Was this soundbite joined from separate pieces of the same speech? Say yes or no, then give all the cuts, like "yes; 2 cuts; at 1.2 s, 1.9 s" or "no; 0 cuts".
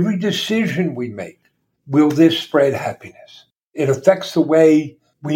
yes; 1 cut; at 3.7 s